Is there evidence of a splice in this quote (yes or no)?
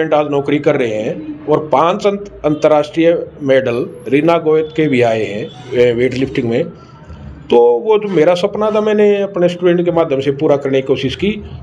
no